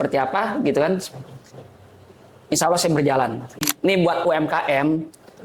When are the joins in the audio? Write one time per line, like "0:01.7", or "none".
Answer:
0:03.7